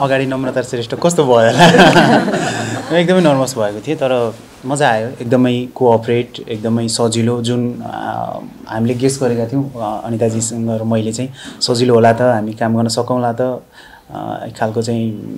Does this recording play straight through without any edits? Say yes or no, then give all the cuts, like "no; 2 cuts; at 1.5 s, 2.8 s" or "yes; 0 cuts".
yes; 0 cuts